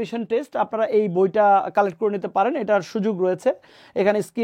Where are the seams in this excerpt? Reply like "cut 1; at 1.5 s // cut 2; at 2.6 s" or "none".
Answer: none

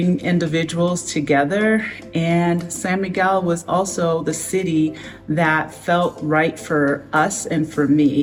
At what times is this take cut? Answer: none

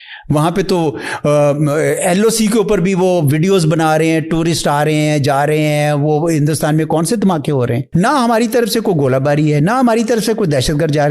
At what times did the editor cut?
cut 1; at 7.8 s

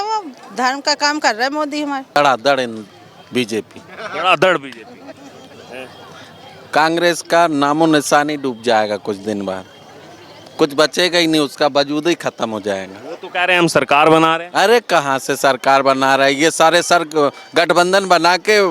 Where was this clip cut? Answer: cut 1; at 2.2 s

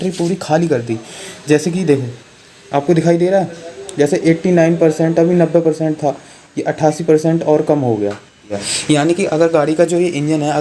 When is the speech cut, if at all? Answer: cut 1; at 8.6 s

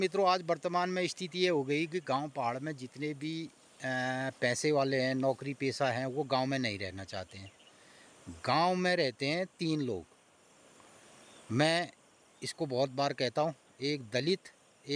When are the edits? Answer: none

